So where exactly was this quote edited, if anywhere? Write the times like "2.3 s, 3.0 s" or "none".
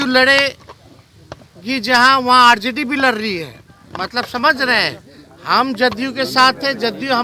none